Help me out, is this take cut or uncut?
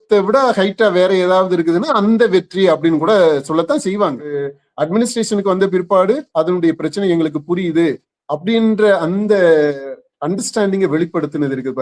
cut